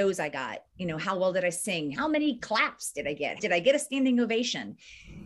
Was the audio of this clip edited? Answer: yes; 2 cuts; at 1.9 s, 3.4 s

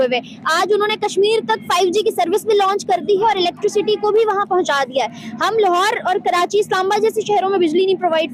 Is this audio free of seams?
yes; 0 cuts

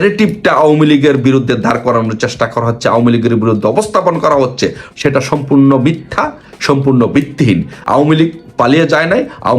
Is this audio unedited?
no; 2 cuts; at 4.8 s, 7.7 s

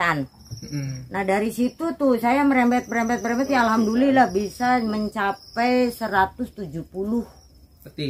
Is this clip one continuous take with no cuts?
yes; 0 cuts

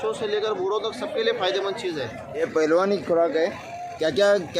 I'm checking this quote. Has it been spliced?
yes; 1 cut; at 2.4 s

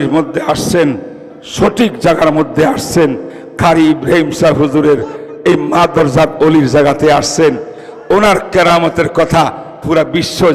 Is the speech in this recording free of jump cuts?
yes; 0 cuts

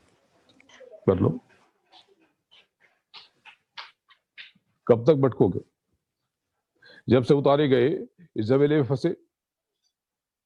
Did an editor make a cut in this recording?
no; 0 cuts

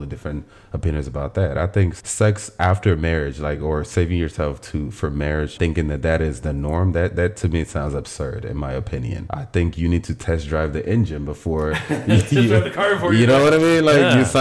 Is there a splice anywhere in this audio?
yes; 3 cuts; at 2.0 s, 5.5 s, 9.2 s

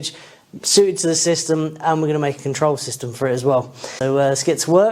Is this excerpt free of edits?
no; 1 cut; at 3.8 s

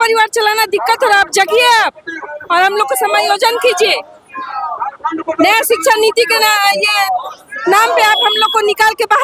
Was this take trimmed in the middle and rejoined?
no; 0 cuts

